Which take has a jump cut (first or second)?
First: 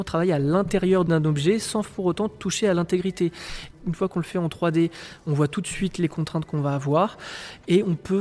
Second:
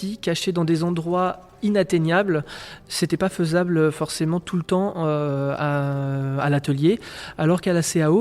first